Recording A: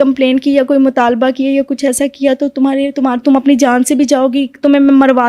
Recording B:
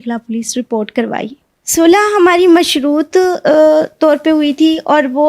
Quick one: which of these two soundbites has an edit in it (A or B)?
B